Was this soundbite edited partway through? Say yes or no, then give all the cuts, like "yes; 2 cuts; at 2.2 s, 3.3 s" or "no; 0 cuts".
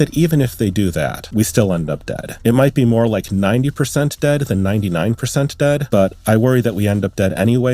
yes; 2 cuts; at 1.2 s, 5.8 s